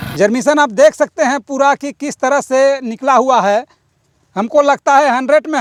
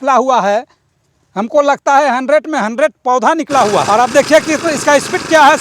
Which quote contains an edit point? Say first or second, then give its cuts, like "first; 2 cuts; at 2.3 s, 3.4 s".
second; 1 cut; at 3.9 s